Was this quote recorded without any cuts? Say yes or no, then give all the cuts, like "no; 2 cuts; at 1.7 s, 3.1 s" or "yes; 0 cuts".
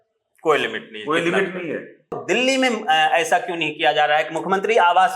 no; 1 cut; at 2.2 s